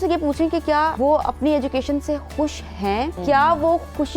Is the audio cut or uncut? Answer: cut